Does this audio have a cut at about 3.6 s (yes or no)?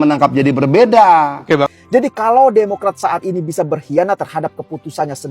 no